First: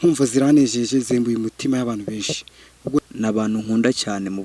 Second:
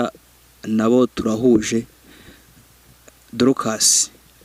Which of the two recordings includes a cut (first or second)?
first